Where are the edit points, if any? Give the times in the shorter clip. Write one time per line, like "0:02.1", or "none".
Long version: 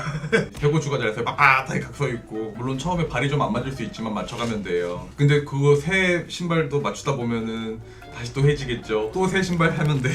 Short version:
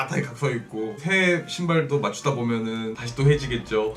0:01.0
0:03.0